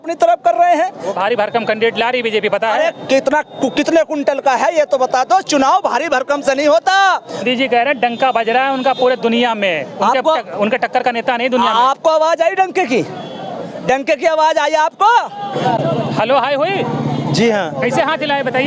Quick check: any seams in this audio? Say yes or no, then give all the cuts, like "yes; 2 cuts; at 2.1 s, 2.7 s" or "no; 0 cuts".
yes; 3 cuts; at 1.1 s, 7.4 s, 15.6 s